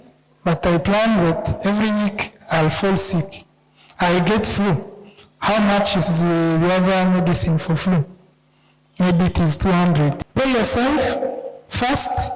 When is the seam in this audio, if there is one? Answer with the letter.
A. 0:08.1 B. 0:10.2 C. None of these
B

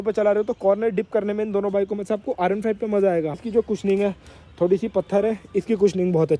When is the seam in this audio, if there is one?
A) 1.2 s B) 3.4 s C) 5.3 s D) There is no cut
B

